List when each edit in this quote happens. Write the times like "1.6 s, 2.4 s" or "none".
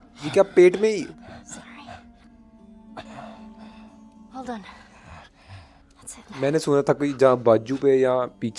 none